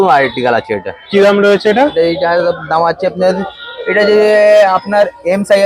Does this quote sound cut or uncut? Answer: uncut